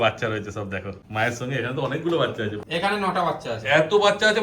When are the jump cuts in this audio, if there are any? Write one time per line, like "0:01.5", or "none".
0:01.0
0:02.6